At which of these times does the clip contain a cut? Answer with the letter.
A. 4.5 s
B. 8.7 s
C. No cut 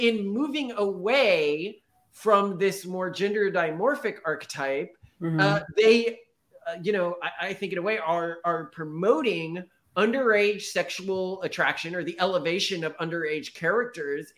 C